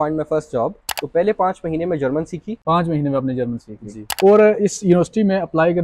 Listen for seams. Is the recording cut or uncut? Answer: cut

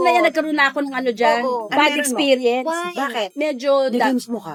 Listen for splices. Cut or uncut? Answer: uncut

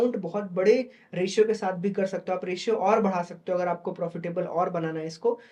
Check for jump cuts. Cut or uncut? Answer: uncut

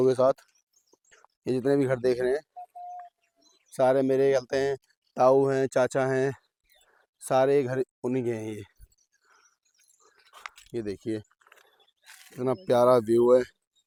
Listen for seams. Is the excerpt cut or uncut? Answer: uncut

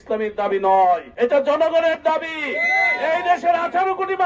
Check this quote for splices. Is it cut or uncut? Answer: cut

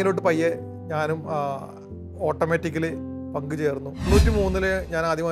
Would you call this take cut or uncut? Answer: cut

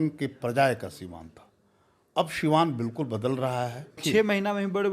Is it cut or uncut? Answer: cut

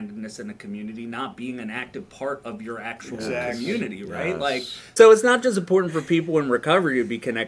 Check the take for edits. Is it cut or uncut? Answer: cut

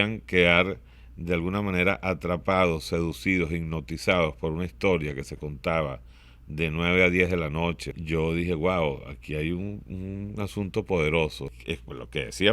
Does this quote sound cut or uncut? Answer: cut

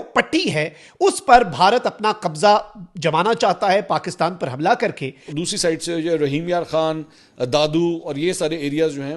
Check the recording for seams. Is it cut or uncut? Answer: cut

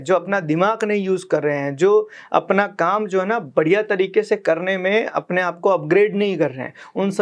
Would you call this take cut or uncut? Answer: uncut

